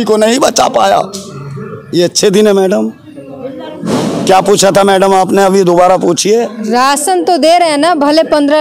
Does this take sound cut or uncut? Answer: uncut